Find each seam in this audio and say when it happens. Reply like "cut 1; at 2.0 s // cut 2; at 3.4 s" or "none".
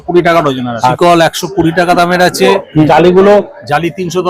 cut 1; at 0.9 s // cut 2; at 2.9 s